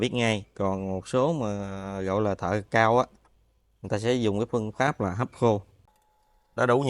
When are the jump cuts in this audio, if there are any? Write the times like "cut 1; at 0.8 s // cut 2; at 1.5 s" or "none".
cut 1; at 5.8 s